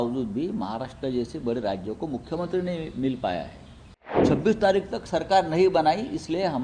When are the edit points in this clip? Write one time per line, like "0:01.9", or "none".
0:04.2